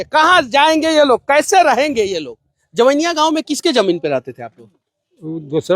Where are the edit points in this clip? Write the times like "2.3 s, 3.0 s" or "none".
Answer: 2.6 s